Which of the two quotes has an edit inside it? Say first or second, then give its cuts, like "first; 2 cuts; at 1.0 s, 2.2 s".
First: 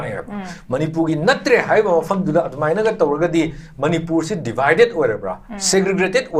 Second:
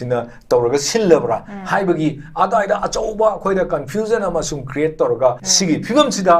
second; 1 cut; at 5.5 s